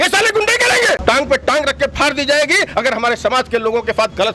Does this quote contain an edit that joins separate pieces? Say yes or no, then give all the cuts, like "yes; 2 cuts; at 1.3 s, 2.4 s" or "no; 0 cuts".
yes; 1 cut; at 1.0 s